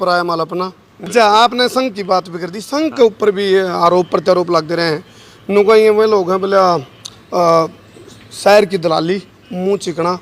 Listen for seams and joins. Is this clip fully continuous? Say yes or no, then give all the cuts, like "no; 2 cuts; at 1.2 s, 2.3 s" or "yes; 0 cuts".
no; 1 cut; at 1.1 s